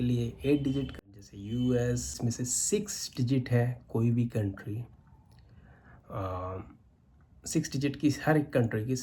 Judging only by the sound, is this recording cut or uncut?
cut